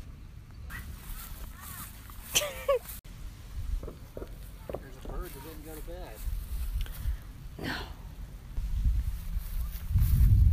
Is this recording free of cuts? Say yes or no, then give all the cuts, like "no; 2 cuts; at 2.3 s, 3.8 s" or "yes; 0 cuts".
yes; 0 cuts